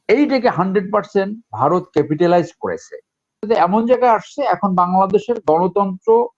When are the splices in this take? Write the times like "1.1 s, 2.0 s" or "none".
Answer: 3.4 s